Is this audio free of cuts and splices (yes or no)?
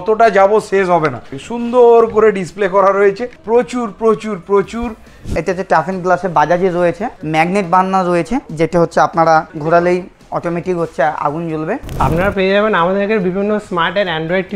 no